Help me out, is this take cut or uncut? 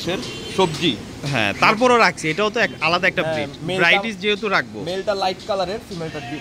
uncut